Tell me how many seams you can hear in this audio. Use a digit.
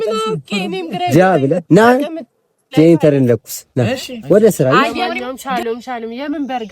1